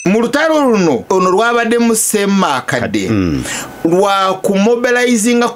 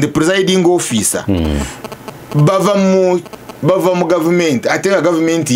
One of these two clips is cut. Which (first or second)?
first